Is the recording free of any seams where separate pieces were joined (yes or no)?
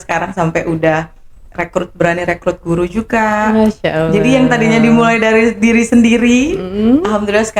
yes